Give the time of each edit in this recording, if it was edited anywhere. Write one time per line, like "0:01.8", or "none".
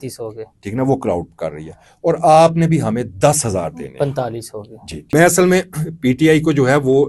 0:05.0